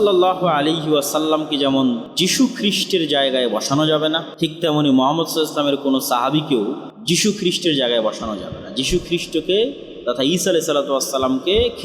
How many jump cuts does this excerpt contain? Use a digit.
3